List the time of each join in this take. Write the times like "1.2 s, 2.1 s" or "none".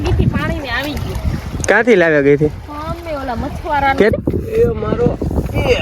4.1 s